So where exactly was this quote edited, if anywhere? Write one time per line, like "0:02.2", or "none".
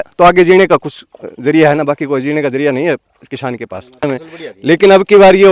0:04.0